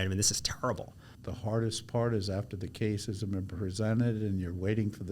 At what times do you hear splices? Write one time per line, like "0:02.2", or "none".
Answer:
0:01.0